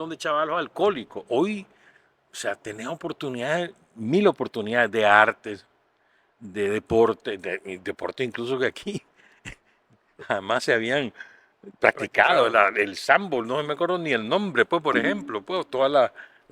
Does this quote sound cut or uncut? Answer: uncut